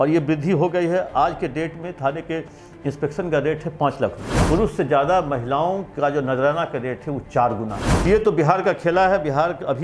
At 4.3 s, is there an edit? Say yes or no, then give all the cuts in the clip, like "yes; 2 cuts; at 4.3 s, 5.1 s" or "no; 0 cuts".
yes; 2 cuts; at 4.3 s, 8.1 s